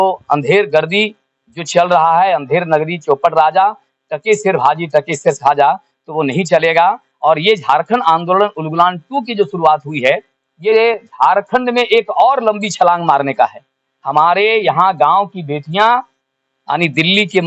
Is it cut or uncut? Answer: uncut